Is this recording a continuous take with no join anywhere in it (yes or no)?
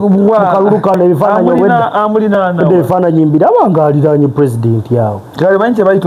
yes